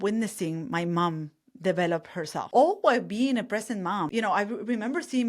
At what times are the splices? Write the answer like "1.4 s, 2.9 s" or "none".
2.4 s, 4.1 s